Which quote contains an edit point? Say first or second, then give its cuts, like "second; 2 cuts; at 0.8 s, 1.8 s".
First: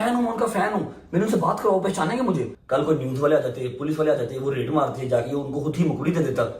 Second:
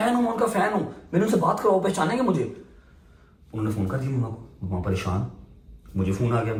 first; 1 cut; at 2.6 s